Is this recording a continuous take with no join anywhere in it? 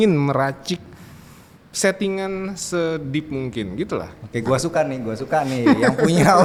yes; 0 cuts

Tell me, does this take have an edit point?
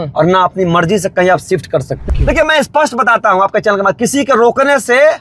yes; 1 cut; at 2.1 s

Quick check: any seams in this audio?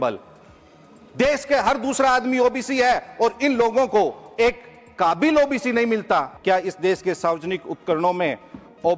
yes; 1 cut; at 6.3 s

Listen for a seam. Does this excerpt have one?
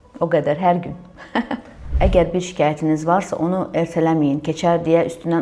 yes; 1 cut; at 1.9 s

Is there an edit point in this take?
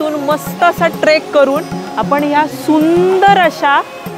no; 0 cuts

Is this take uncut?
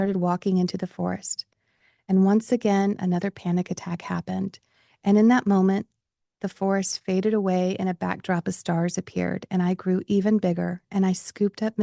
yes; 0 cuts

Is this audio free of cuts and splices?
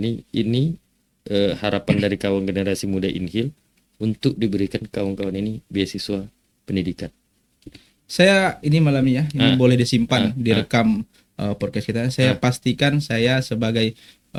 yes; 0 cuts

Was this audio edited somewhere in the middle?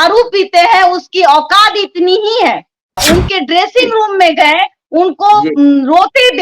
yes; 1 cut; at 3.0 s

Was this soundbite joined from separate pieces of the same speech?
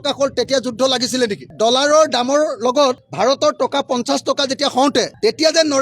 yes; 1 cut; at 1.5 s

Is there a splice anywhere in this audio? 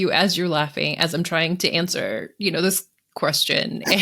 no; 0 cuts

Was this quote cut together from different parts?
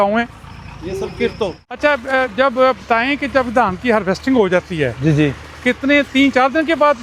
no; 0 cuts

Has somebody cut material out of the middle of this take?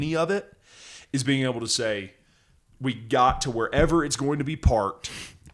no; 0 cuts

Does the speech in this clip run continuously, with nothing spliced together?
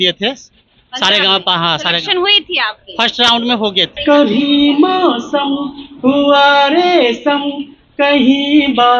no; 1 cut; at 3.9 s

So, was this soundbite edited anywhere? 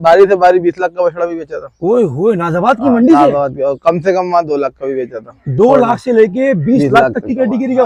no; 0 cuts

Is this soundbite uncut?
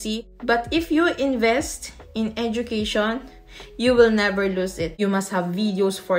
no; 1 cut; at 4.8 s

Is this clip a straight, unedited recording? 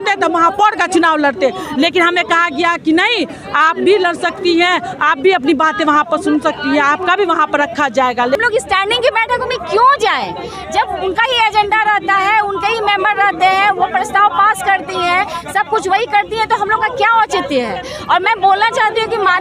no; 1 cut; at 8.4 s

